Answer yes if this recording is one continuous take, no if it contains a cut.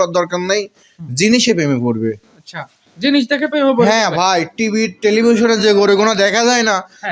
yes